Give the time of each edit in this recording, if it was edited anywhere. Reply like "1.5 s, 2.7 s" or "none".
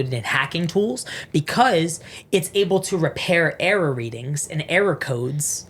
none

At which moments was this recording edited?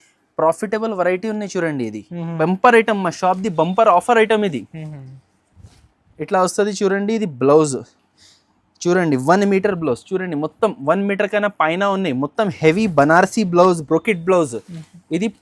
2.3 s

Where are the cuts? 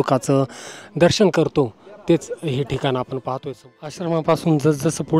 3.9 s

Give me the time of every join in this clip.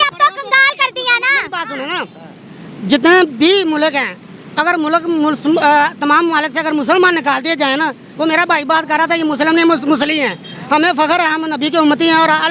none

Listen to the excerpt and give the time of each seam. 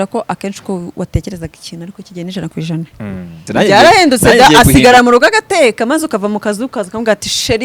3.4 s

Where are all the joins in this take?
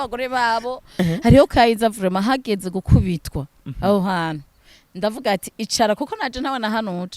1.0 s

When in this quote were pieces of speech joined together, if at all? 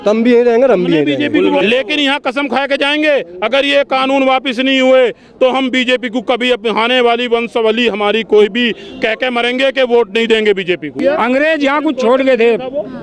1.6 s, 11.0 s

